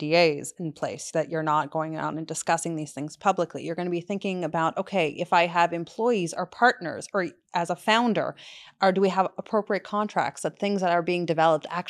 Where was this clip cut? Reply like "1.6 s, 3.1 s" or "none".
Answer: none